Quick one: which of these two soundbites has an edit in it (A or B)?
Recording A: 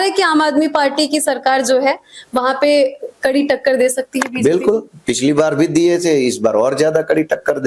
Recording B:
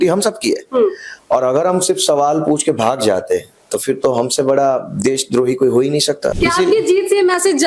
B